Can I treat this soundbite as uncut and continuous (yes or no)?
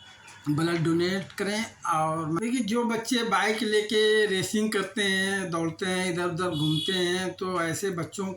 no